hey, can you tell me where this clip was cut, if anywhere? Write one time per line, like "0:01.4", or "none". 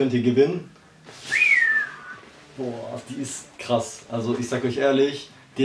none